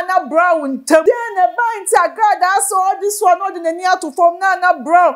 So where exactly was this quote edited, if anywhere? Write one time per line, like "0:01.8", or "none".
0:01.0

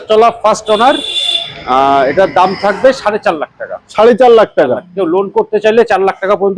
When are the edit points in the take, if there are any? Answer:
none

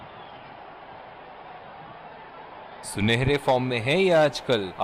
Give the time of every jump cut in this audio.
0:02.9

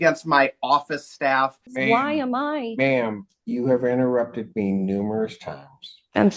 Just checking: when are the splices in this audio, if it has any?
0:01.7

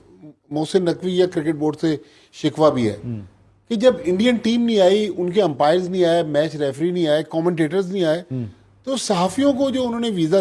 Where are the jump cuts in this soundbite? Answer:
none

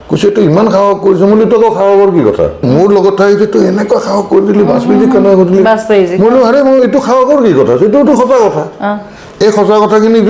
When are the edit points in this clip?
0:02.6

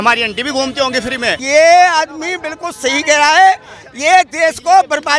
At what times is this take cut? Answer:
0:01.4

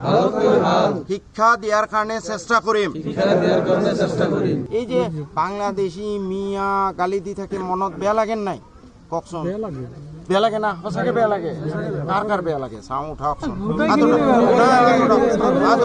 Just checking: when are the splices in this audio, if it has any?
0:04.7

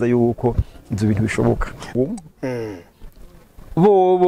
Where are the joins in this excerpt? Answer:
0:01.9

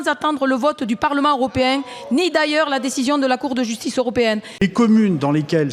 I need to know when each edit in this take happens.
0:04.6

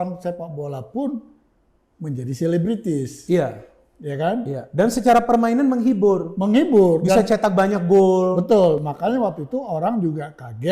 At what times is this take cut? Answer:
none

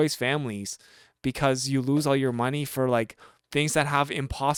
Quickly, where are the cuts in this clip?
none

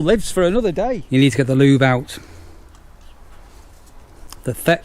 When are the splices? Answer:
0:00.9

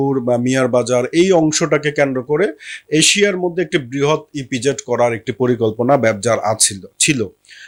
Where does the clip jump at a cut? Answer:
none

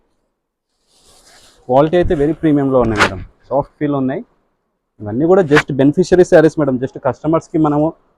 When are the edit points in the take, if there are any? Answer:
none

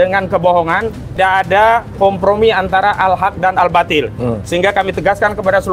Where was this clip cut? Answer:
0:01.2

